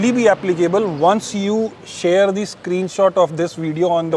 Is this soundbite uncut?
yes; 0 cuts

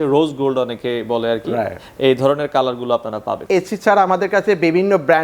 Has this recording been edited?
yes; 1 cut; at 3.4 s

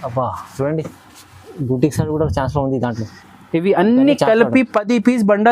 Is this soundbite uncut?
yes; 0 cuts

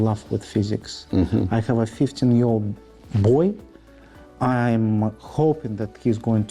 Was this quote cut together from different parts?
no; 0 cuts

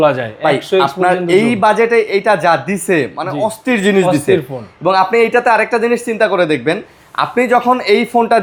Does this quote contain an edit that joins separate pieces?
no; 0 cuts

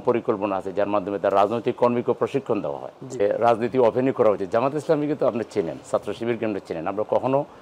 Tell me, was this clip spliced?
yes; 1 cut; at 3.2 s

